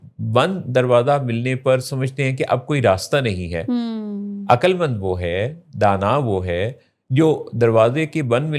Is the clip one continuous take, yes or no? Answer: yes